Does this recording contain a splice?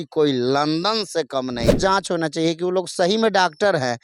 yes; 1 cut; at 1.8 s

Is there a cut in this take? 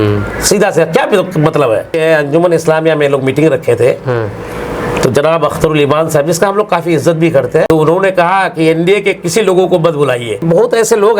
yes; 3 cuts; at 1.9 s, 7.7 s, 10.4 s

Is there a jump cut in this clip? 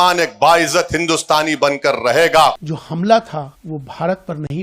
yes; 2 cuts; at 2.7 s, 3.6 s

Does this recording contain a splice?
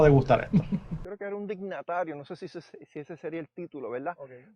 yes; 1 cut; at 1.0 s

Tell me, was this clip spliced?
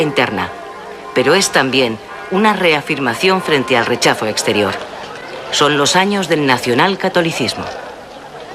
yes; 1 cut; at 6.6 s

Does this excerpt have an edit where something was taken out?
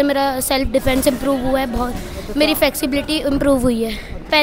no; 0 cuts

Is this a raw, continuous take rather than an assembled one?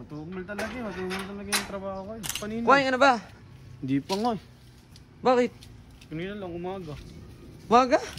no; 1 cut; at 2.3 s

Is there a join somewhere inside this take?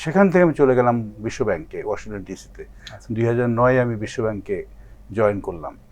no; 0 cuts

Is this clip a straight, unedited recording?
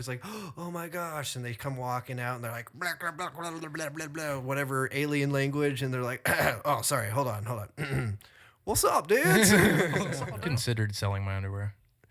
no; 1 cut; at 10.1 s

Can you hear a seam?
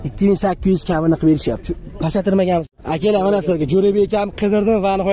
yes; 1 cut; at 2.6 s

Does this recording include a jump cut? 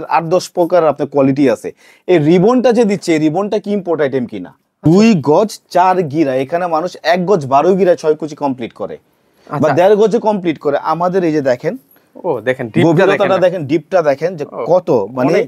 yes; 1 cut; at 4.7 s

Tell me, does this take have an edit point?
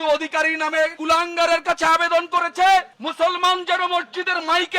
yes; 1 cut; at 1.0 s

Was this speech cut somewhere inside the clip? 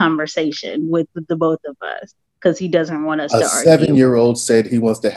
no; 0 cuts

